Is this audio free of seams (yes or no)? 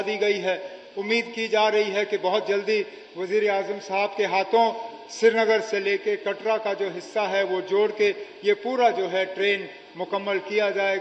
yes